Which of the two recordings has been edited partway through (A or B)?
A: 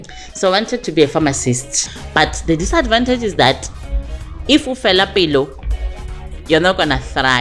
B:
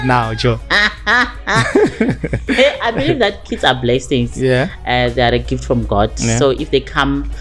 A